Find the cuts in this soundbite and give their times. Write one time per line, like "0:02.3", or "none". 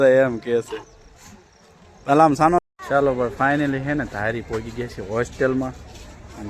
0:02.6